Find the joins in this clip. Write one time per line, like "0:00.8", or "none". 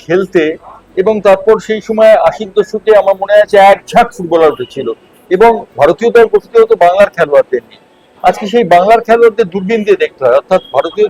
none